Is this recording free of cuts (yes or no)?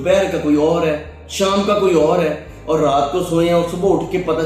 yes